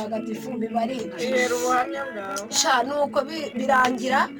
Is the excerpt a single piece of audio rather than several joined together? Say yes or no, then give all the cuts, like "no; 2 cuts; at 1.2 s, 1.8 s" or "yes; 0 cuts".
no; 1 cut; at 1.9 s